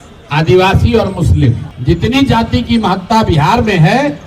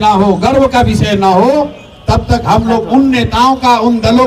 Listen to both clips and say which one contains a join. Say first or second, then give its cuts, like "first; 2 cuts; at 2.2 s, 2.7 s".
first; 1 cut; at 1.7 s